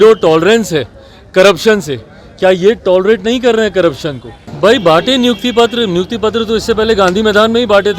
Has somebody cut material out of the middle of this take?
yes; 1 cut; at 4.5 s

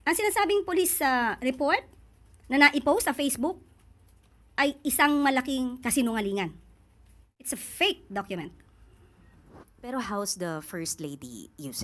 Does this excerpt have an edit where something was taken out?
yes; 1 cut; at 7.5 s

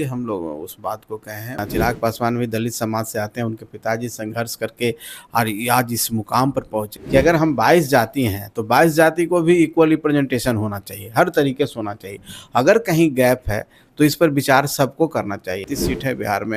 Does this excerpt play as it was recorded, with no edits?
no; 3 cuts; at 1.6 s, 6.9 s, 15.6 s

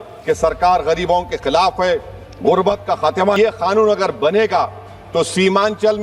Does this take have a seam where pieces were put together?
yes; 1 cut; at 3.4 s

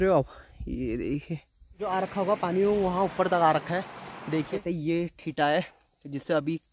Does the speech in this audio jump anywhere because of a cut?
yes; 2 cuts; at 1.7 s, 4.6 s

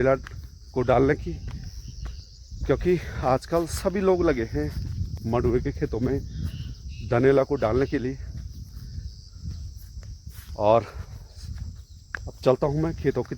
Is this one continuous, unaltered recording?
yes; 0 cuts

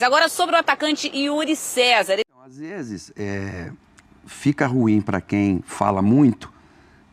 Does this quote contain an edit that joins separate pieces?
yes; 1 cut; at 2.3 s

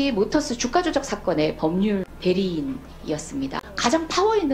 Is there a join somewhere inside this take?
yes; 2 cuts; at 2.0 s, 3.7 s

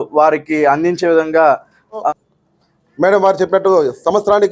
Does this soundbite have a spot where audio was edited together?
yes; 1 cut; at 2.1 s

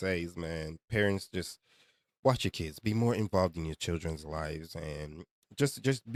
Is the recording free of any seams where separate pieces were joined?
yes; 0 cuts

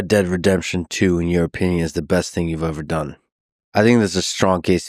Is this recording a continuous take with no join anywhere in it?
yes; 0 cuts

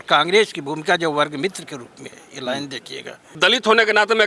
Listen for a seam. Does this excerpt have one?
yes; 1 cut; at 3.3 s

